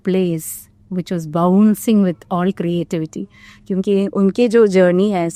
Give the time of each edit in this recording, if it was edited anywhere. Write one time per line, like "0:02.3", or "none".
none